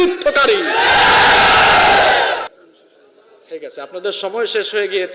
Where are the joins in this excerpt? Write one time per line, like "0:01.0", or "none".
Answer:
0:02.5